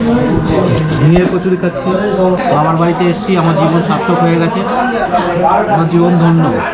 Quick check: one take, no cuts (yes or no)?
no